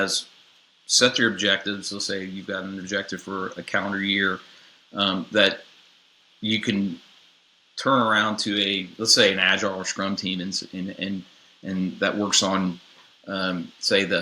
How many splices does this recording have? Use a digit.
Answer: 0